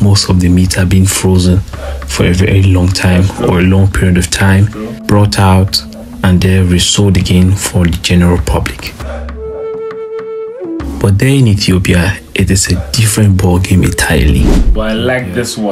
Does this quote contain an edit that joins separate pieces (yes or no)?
yes